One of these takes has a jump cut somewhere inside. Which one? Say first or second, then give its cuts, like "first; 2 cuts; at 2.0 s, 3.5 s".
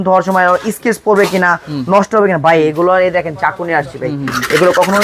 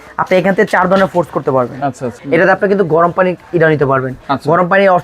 second; 1 cut; at 2.1 s